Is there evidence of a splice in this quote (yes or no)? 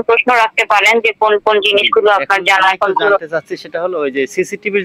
no